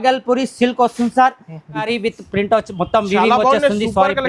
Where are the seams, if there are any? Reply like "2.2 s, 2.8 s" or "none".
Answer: 1.8 s